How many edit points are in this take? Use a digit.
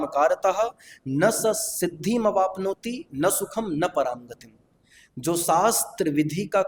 0